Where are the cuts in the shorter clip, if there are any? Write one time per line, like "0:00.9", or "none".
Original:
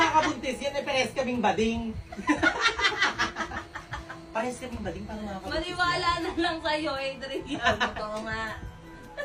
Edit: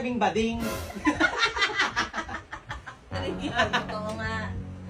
0:03.1